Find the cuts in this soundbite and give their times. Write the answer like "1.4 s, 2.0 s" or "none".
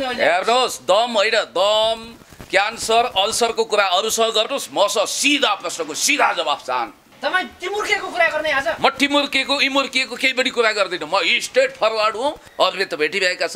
7.0 s, 12.4 s